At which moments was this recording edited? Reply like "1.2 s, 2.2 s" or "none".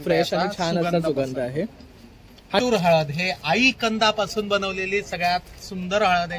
2.6 s